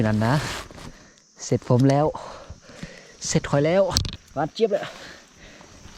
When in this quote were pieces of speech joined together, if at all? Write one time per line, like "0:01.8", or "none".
0:04.1